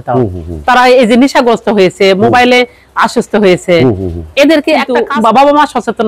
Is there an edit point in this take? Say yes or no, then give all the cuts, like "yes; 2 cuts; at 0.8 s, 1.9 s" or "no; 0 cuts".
yes; 1 cut; at 5.0 s